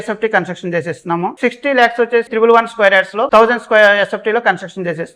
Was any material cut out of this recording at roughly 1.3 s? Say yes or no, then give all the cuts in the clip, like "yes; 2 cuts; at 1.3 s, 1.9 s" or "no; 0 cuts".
yes; 3 cuts; at 1.3 s, 2.3 s, 3.2 s